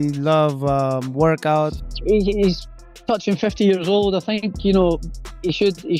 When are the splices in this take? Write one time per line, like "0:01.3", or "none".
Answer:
0:01.9